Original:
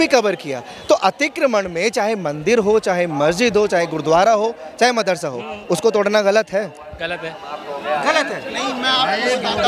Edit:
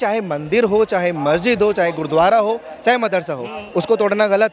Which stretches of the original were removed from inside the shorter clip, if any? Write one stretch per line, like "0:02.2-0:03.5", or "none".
none